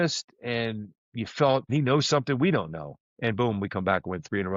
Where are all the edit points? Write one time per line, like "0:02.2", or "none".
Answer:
0:01.7